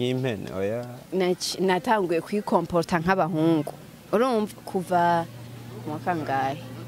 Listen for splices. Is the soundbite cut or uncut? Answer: cut